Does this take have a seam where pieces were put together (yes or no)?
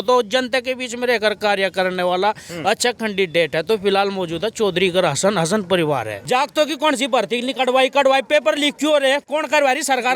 yes